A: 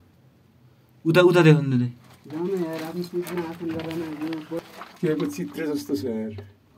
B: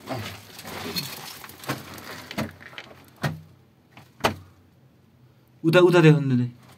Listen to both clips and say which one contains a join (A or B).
A